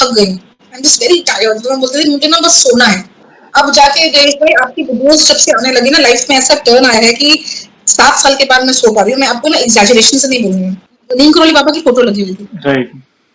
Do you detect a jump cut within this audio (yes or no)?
yes